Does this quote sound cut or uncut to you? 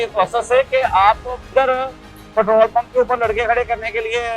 cut